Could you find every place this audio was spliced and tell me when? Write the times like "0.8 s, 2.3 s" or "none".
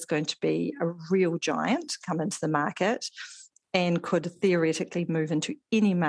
none